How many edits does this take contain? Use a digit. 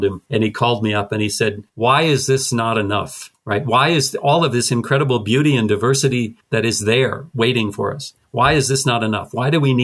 0